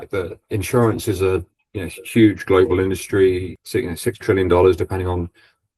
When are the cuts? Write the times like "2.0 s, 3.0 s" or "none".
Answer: 3.5 s